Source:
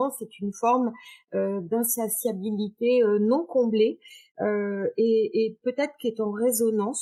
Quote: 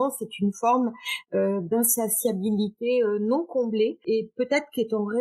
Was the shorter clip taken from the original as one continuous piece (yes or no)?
no